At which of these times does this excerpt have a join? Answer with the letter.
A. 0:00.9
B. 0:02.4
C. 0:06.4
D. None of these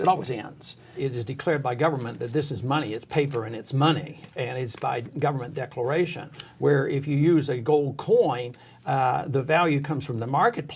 A